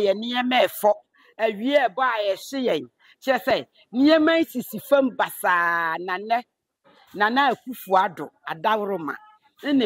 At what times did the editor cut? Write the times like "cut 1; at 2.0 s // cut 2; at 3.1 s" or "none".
none